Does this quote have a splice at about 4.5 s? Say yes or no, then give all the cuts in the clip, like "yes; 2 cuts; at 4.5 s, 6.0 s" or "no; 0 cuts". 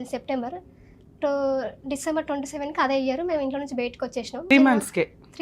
yes; 1 cut; at 4.5 s